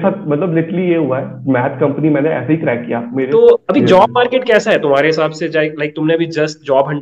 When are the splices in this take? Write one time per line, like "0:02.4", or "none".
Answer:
0:03.3